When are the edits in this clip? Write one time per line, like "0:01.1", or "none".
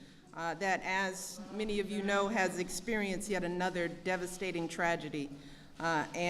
0:01.4